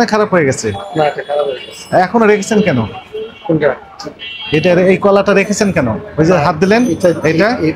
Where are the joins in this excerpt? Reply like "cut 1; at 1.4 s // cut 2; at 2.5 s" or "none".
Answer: none